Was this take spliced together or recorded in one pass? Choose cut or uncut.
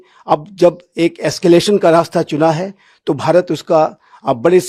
uncut